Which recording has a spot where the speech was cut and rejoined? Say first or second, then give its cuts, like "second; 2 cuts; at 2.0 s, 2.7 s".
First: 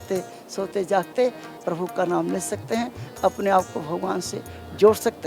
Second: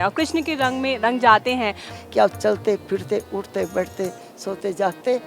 second; 1 cut; at 1.9 s